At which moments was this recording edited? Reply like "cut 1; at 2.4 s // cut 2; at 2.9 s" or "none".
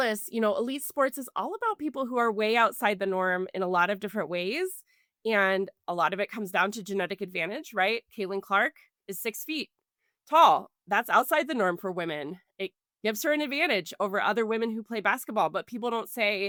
none